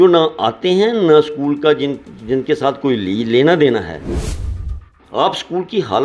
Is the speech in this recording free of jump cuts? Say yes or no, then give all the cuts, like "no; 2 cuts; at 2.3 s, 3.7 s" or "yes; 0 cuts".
no; 1 cut; at 4.4 s